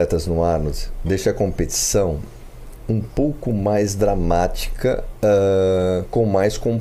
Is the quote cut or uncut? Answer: uncut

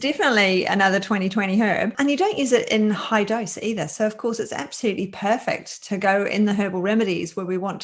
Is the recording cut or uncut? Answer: uncut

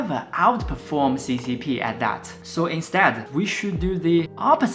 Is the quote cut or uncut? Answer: uncut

